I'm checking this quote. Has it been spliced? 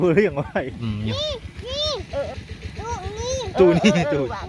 yes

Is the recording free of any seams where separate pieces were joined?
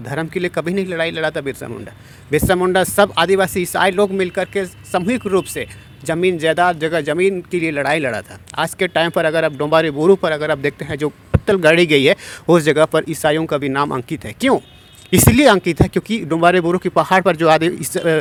yes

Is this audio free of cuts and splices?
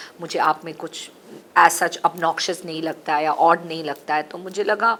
yes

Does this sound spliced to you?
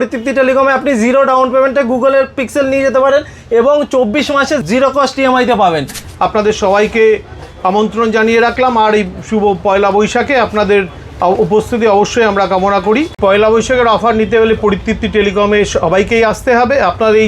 yes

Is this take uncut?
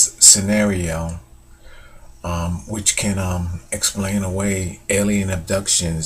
no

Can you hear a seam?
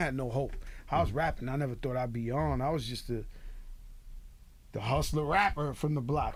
no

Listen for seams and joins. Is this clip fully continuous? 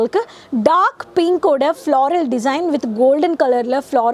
yes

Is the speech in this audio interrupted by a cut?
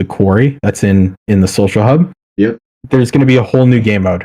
yes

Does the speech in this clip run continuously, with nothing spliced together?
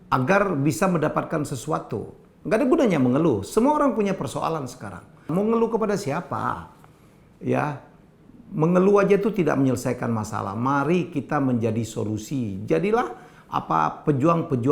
no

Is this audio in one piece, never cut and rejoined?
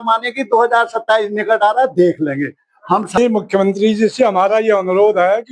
no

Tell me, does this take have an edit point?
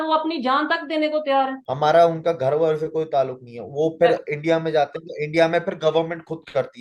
yes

